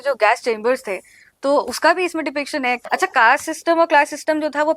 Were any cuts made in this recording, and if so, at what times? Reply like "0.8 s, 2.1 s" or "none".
2.8 s